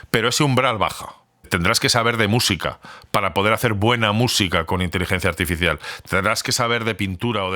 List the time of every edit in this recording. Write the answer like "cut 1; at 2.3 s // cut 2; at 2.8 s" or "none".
cut 1; at 1.5 s